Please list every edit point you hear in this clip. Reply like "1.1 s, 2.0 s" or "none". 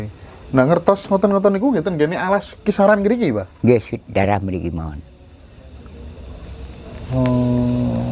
none